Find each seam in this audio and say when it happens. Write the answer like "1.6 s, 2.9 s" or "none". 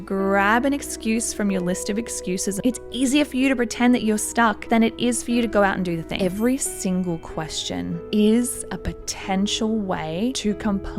2.6 s, 6.1 s